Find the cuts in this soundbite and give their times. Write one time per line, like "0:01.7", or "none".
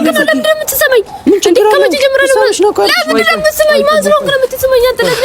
none